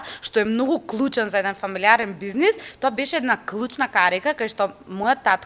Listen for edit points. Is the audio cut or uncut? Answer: uncut